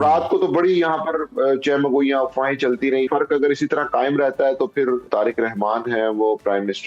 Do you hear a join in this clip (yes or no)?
yes